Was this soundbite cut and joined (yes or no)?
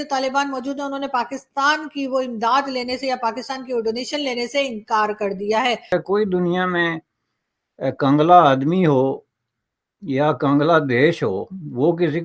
yes